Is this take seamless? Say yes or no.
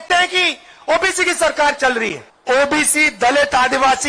no